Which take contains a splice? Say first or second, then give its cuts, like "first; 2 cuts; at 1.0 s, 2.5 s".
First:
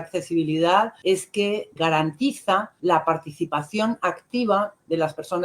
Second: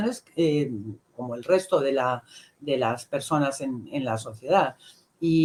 first; 2 cuts; at 1.2 s, 2.7 s